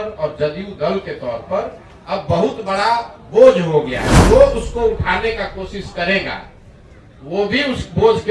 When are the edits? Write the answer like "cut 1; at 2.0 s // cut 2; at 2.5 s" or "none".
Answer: none